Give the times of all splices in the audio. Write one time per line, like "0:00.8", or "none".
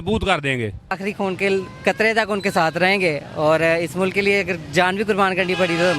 0:00.9